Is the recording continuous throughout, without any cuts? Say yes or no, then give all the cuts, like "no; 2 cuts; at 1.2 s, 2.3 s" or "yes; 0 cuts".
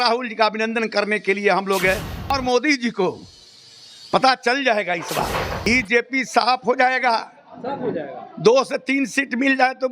no; 2 cuts; at 2.3 s, 5.7 s